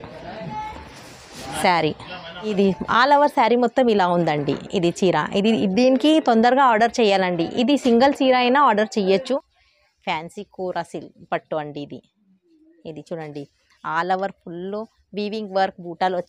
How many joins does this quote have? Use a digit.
2